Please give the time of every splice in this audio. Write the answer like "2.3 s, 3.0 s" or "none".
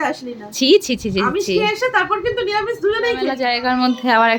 3.5 s